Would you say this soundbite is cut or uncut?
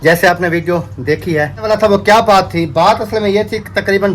cut